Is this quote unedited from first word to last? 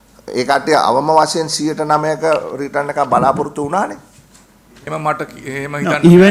yes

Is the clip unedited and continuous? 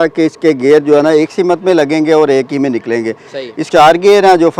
no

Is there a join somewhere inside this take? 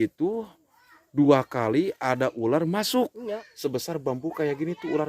yes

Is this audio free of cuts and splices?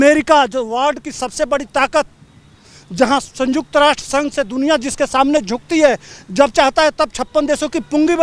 yes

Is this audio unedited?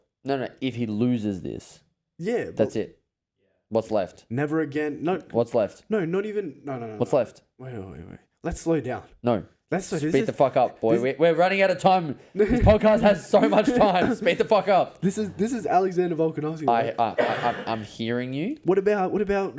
yes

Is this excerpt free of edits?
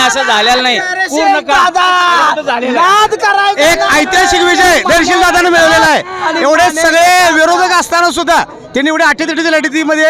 yes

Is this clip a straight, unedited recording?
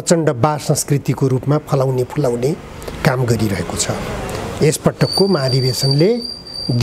yes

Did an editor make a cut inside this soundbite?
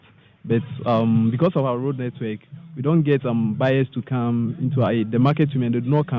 no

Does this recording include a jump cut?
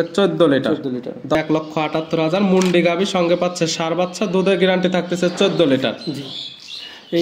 yes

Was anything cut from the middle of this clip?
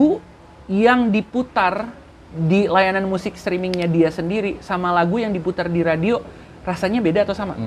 no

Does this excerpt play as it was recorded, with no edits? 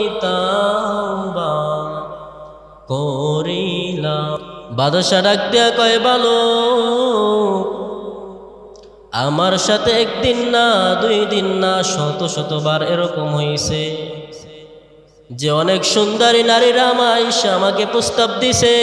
no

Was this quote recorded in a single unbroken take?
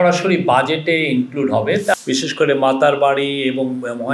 no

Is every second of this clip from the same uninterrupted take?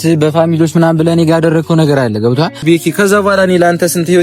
no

